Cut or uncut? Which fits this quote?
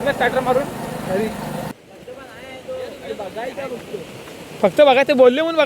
cut